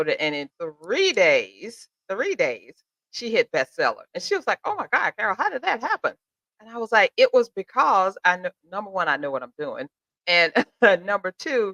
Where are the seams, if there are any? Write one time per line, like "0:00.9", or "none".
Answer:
none